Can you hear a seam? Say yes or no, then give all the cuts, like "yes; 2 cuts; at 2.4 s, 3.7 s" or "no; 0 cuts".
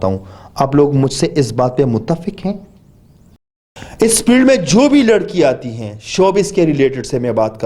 yes; 1 cut; at 3.5 s